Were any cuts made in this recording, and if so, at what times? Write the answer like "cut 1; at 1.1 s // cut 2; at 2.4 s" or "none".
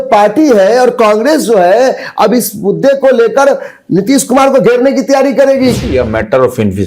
cut 1; at 5.8 s